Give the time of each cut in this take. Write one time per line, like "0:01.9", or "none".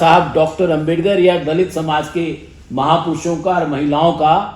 none